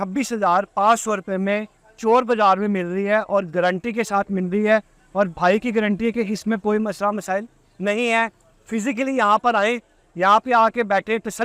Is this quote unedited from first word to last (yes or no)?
yes